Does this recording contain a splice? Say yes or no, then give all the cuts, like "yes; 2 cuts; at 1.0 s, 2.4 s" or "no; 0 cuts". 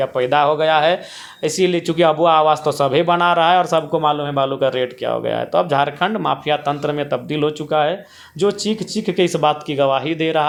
no; 0 cuts